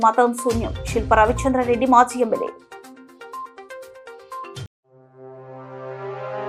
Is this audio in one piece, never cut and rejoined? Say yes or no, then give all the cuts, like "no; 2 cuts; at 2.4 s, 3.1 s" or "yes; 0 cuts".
yes; 0 cuts